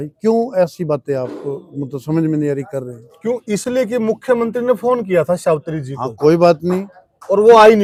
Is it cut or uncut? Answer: uncut